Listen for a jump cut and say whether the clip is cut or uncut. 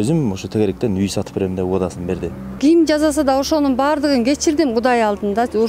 cut